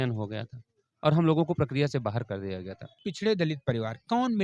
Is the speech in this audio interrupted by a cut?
yes; 1 cut; at 3.1 s

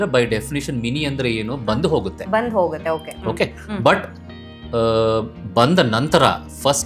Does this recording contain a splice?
no; 0 cuts

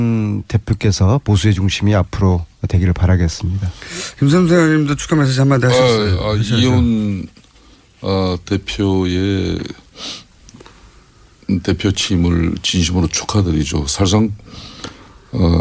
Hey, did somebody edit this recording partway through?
yes; 1 cut; at 1.2 s

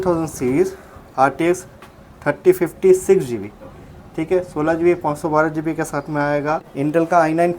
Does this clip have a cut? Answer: yes; 1 cut; at 6.7 s

